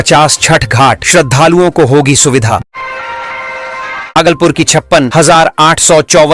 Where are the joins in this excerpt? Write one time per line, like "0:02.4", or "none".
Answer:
0:02.7
0:04.1